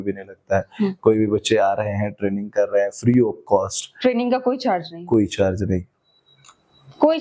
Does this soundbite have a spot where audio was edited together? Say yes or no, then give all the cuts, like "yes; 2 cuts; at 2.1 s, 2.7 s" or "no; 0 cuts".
no; 0 cuts